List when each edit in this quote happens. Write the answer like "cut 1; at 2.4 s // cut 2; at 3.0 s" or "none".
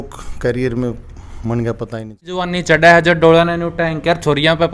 cut 1; at 2.5 s